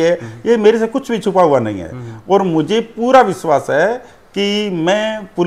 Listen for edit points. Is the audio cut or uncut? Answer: uncut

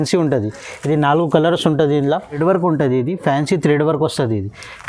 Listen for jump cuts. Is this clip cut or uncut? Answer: cut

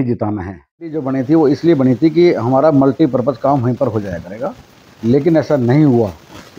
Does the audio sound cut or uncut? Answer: cut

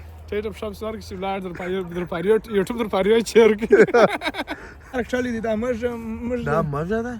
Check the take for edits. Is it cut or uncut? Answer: cut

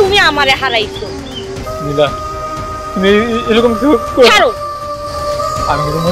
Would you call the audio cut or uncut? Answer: uncut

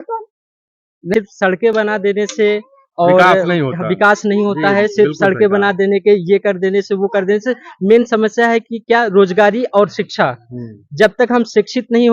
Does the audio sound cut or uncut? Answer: cut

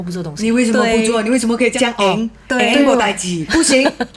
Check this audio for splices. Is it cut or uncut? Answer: cut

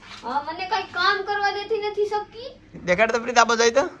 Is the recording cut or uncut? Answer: cut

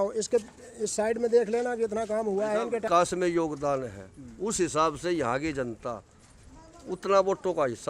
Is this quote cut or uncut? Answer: cut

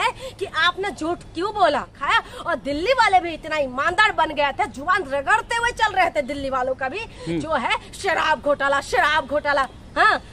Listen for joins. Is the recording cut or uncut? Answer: cut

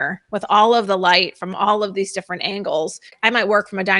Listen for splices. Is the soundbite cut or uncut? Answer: cut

